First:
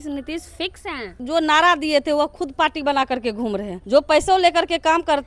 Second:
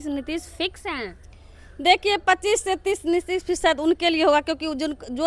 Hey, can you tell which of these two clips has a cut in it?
first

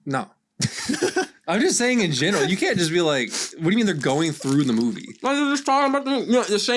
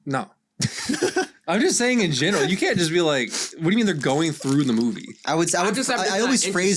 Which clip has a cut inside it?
second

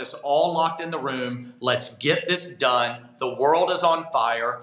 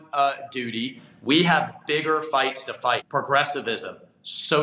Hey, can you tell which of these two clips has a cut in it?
second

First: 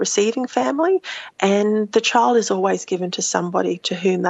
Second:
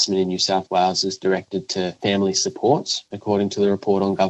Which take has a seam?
second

